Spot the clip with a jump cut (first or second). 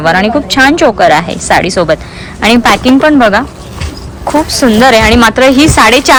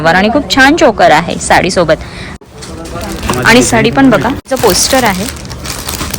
second